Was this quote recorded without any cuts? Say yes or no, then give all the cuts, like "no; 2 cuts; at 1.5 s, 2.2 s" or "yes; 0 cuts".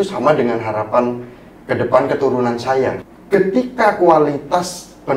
no; 1 cut; at 3.1 s